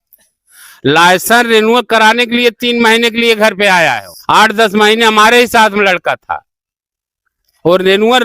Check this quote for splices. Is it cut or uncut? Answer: cut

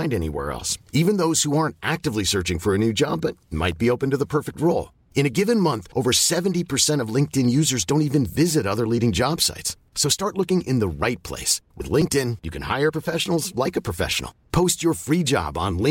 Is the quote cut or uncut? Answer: uncut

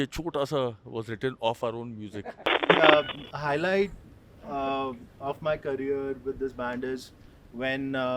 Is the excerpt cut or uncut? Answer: cut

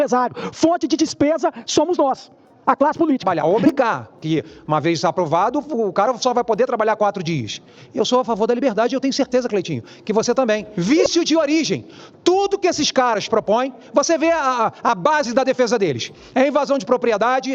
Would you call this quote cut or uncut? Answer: cut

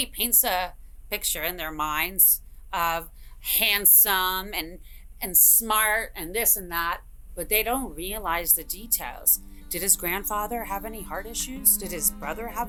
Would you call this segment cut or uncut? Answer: uncut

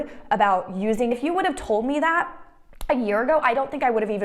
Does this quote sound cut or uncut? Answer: cut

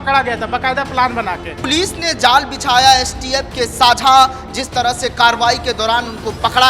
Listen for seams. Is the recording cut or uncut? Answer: cut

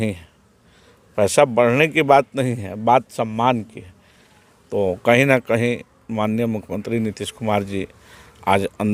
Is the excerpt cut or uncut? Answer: uncut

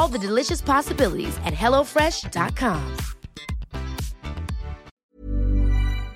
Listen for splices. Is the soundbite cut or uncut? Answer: cut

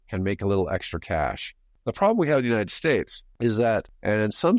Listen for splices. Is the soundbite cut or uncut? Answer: cut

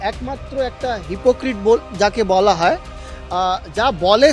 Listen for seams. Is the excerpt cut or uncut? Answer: uncut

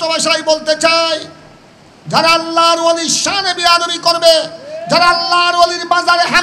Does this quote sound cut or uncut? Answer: uncut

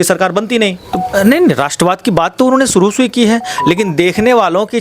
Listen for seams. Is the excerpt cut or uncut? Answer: cut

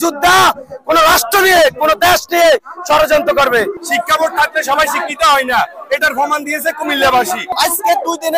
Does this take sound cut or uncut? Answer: cut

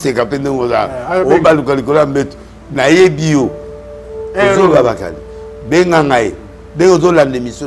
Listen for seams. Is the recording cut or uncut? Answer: uncut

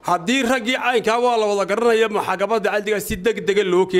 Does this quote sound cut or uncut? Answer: uncut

